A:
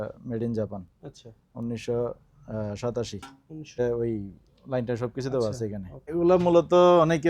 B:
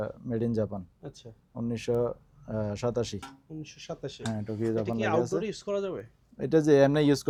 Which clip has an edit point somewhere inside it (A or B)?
A